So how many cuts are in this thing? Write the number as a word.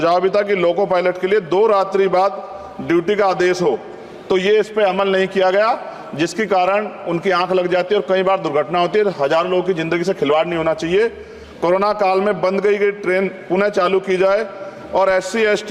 zero